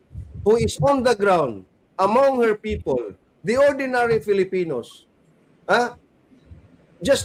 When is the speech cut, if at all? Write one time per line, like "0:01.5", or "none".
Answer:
none